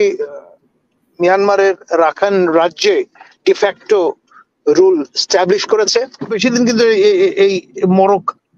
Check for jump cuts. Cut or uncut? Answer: cut